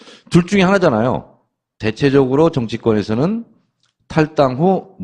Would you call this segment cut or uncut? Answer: uncut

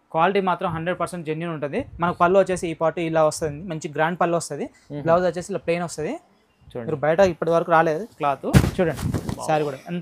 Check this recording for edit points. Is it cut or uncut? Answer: uncut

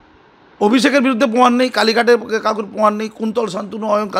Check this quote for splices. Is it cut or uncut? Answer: uncut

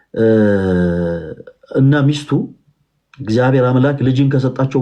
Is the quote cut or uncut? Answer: uncut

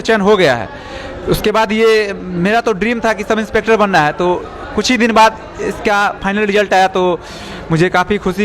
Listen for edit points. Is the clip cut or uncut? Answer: uncut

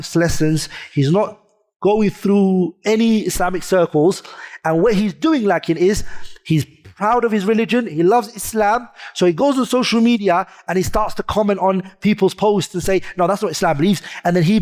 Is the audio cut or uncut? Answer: uncut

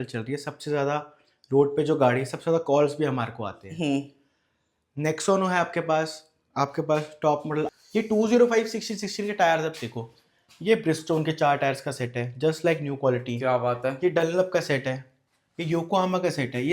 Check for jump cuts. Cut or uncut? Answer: cut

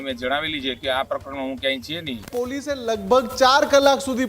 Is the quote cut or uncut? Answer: cut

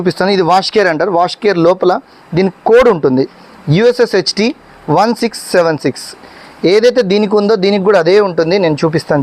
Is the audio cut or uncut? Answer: uncut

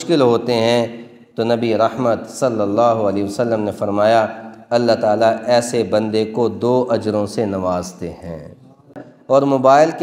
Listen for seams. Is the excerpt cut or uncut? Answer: cut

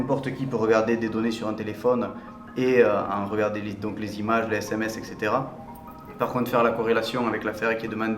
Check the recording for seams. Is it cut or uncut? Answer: uncut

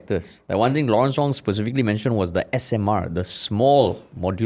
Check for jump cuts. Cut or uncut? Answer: uncut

